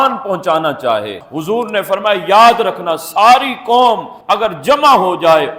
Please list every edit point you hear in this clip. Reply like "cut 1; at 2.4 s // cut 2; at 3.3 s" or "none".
cut 1; at 1.2 s